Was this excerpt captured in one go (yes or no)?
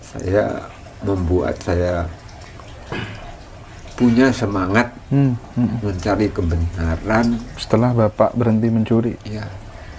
yes